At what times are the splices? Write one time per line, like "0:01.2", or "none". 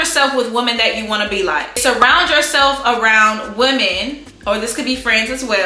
0:01.8